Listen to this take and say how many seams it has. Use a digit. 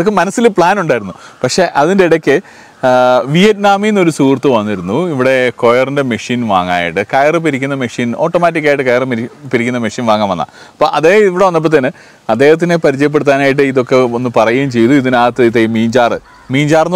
0